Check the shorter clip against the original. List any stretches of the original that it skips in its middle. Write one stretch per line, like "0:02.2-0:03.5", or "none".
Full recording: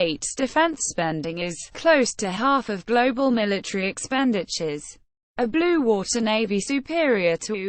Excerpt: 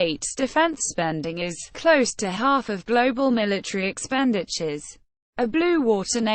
none